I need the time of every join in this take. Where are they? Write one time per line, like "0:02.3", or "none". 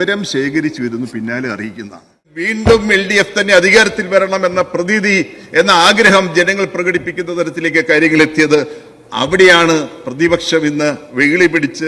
0:02.4

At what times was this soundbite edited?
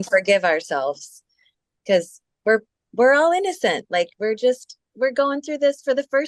0:02.2

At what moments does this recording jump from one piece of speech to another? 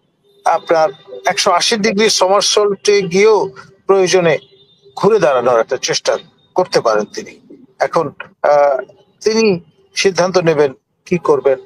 none

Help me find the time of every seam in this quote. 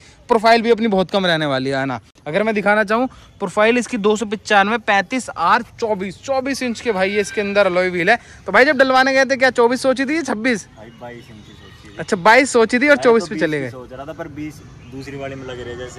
none

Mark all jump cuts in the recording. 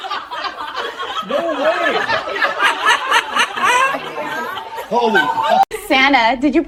none

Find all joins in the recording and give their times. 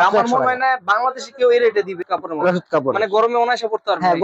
0:02.0

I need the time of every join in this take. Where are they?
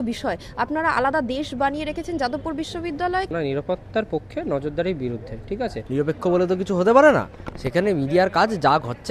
0:03.3
0:05.8

